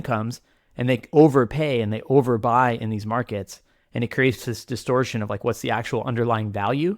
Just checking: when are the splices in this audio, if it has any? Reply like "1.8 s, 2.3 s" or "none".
1.1 s